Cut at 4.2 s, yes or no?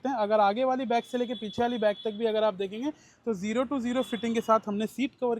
no